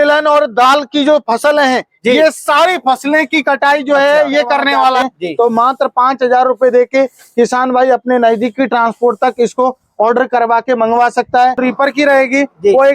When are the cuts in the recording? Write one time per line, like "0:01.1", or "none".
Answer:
0:05.0
0:11.6